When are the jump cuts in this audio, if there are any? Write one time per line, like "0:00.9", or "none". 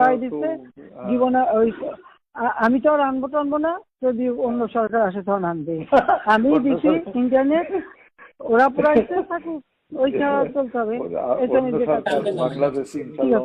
none